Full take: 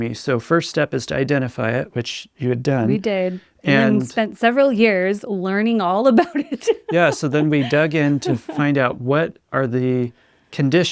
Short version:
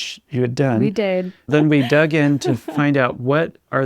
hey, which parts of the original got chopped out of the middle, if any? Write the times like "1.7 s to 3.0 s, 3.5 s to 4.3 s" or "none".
3.5 s to 7.2 s

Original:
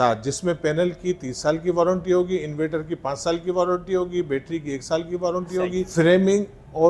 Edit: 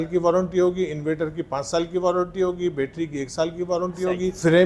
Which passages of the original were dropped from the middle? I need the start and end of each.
none

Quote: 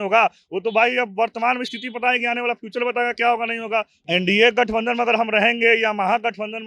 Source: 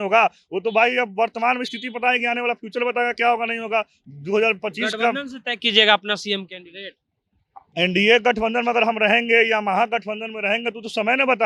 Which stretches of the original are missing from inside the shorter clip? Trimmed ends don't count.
4.0 s to 7.6 s

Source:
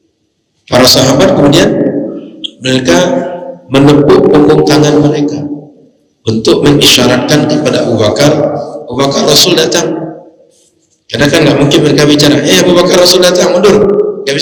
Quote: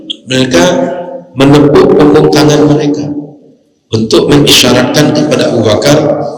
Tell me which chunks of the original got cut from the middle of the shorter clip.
none

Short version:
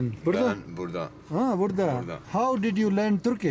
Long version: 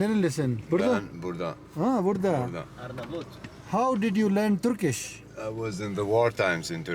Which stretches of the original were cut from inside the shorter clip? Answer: 2.6 s to 3.5 s

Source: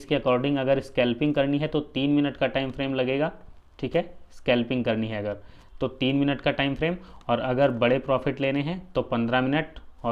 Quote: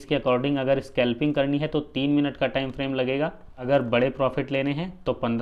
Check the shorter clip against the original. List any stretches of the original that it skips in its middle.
3.6 s to 7.5 s

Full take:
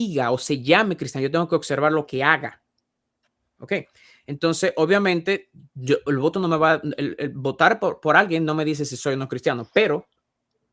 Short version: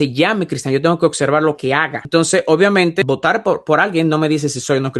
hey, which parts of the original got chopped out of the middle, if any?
2.4 s to 4.2 s, 5.3 s to 7.4 s

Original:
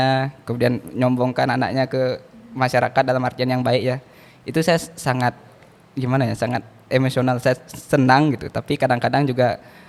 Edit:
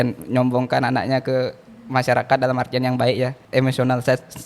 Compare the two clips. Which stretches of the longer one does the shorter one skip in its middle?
4.1 s to 6.8 s

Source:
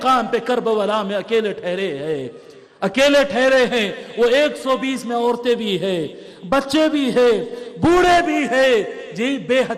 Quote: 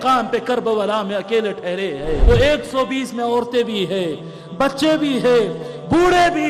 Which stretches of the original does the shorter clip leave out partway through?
2.2 s to 4.1 s

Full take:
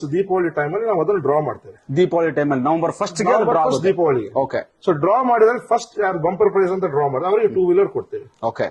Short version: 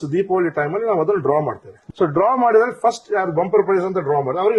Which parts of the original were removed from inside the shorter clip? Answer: 1.8 s to 4.6 s

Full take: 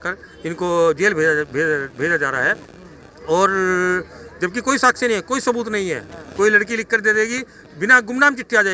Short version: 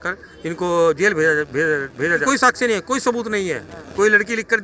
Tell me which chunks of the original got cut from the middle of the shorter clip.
2.2 s to 4.6 s

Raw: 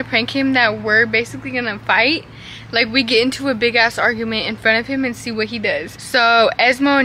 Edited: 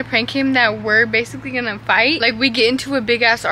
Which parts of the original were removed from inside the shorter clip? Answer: 2.2 s to 2.7 s

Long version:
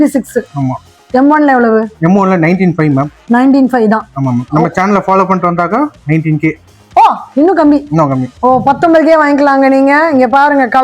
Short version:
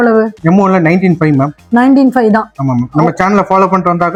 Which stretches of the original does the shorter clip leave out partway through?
none

